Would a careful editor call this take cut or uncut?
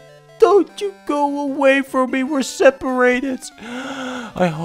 uncut